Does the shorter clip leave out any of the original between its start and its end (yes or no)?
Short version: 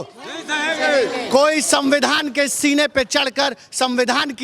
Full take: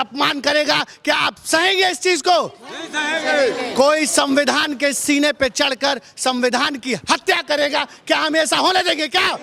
no